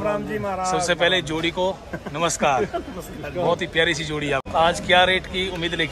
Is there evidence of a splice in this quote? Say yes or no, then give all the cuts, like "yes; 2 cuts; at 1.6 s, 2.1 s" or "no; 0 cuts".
yes; 1 cut; at 4.5 s